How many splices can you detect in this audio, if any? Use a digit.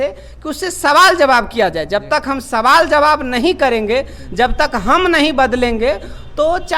0